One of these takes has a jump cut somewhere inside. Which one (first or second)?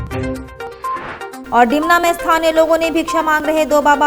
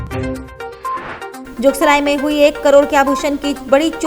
second